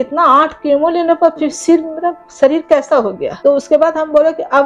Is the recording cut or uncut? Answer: uncut